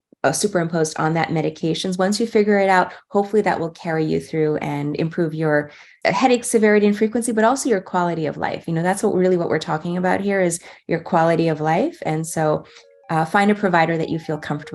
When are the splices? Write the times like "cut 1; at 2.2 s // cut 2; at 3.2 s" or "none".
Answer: cut 1; at 5.8 s